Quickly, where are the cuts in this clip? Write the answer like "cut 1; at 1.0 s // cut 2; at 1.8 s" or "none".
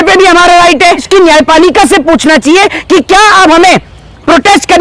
cut 1; at 1.0 s

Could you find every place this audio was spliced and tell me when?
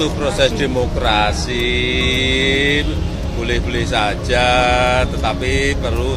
none

